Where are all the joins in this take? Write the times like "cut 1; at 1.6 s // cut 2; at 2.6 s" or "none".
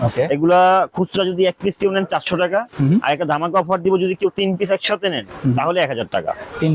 none